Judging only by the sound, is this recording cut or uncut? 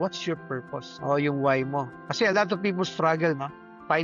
uncut